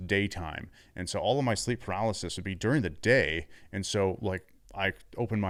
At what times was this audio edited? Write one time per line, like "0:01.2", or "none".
none

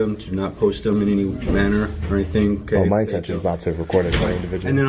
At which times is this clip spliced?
none

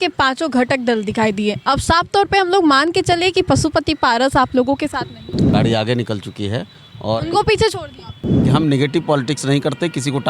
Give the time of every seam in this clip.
0:05.5
0:08.4

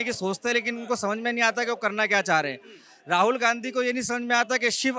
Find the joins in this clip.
none

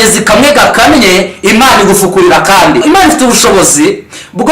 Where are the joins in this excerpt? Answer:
0:02.8

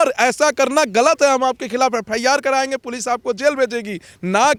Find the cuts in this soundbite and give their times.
none

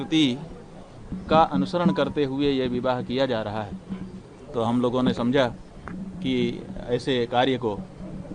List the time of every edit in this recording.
none

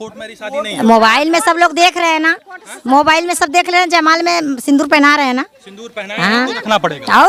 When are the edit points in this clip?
none

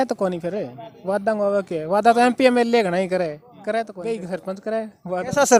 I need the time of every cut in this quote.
none

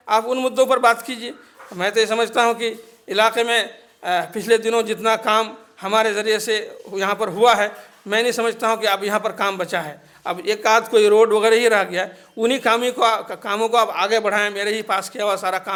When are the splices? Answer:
none

